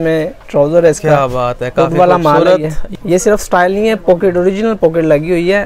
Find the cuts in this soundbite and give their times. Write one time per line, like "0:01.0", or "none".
0:02.8